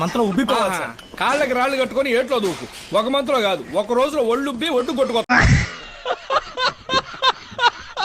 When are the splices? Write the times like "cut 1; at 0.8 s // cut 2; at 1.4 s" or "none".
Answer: none